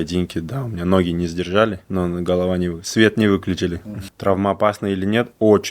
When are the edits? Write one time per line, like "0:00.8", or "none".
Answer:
0:01.8
0:03.8